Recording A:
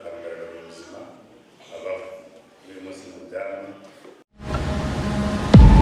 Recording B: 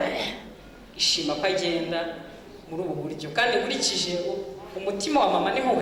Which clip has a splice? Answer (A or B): A